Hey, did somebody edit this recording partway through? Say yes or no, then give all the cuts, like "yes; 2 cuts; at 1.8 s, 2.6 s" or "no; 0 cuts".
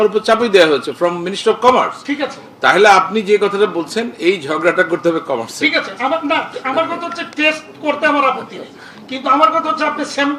no; 0 cuts